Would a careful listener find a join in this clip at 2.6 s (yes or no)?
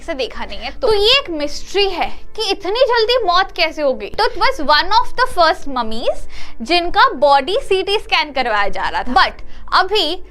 no